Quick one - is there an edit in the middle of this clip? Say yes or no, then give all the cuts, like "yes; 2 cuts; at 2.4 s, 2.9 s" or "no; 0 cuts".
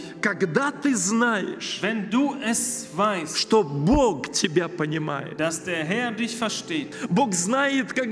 yes; 1 cut; at 6.9 s